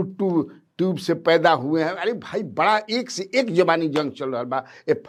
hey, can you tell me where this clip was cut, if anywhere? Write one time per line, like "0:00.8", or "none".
none